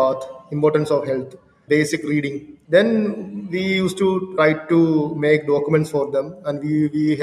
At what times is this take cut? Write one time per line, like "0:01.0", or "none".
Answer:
0:01.5
0:02.5
0:04.3